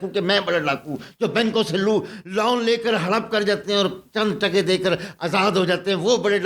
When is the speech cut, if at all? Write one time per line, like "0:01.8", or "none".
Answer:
none